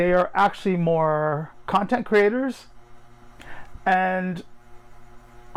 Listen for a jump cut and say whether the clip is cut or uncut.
uncut